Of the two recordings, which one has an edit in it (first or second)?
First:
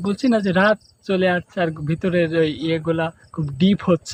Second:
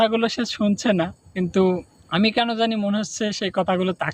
second